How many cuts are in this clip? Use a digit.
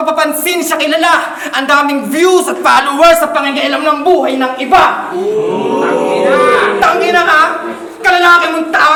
0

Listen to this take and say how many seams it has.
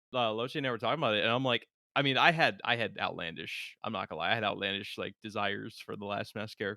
1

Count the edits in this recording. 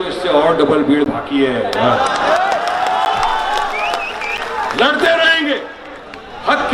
0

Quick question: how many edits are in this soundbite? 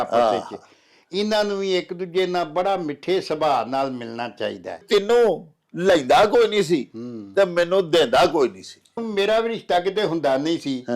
2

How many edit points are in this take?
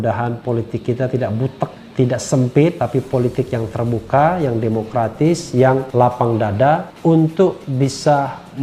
1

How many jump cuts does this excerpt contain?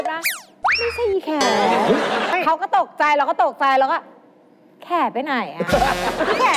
1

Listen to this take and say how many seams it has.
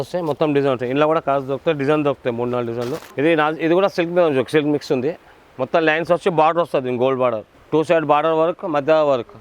2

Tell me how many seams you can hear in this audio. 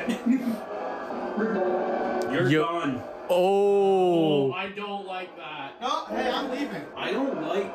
2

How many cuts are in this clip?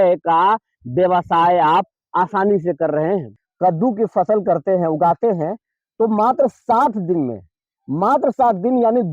1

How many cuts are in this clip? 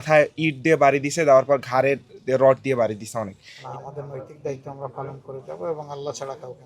1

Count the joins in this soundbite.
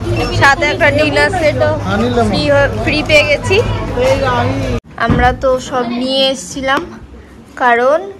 1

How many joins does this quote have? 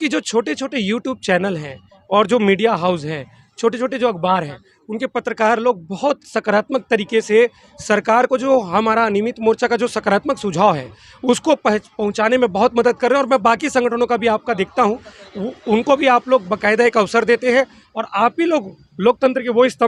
0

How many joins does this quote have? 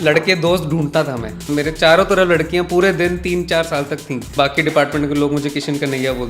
2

